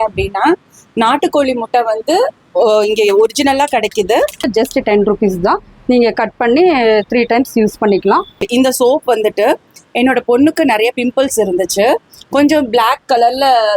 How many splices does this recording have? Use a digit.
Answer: 2